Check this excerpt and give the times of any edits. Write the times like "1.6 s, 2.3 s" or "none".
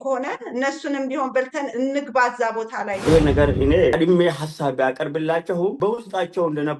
3.0 s, 3.9 s, 5.8 s